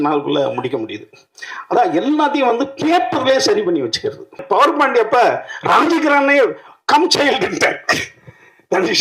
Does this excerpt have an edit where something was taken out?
yes; 1 cut; at 4.4 s

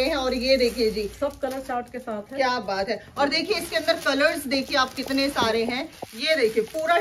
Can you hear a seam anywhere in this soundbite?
no; 0 cuts

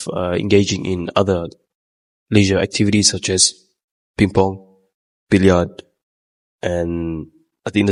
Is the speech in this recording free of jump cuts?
yes; 0 cuts

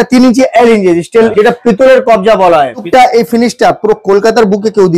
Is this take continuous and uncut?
no; 2 cuts; at 1.3 s, 2.9 s

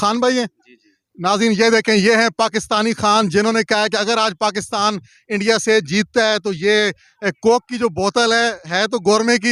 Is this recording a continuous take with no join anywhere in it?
yes; 0 cuts

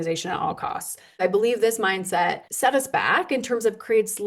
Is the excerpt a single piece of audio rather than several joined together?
no; 2 cuts; at 1.2 s, 2.5 s

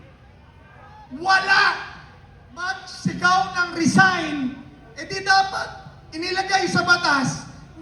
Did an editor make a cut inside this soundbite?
yes; 1 cut; at 2.8 s

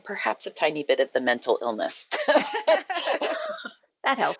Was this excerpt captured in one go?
yes; 0 cuts

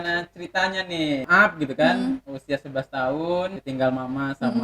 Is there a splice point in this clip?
yes; 2 cuts; at 1.3 s, 3.6 s

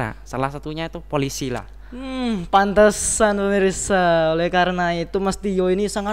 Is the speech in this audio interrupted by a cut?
no; 0 cuts

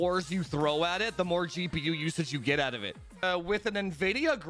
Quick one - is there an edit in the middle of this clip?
yes; 1 cut; at 3.2 s

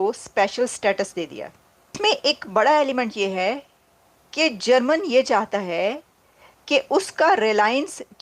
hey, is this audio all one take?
no; 1 cut; at 1.9 s

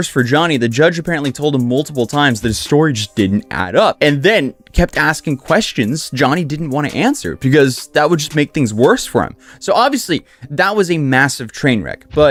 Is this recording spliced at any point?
no; 0 cuts

